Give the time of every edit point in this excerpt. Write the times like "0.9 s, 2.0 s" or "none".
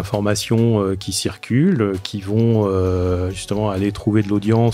1.1 s